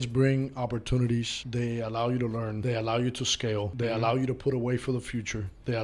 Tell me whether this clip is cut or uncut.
cut